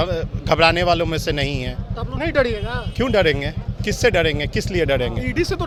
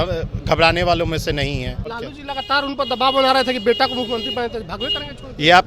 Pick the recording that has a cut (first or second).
second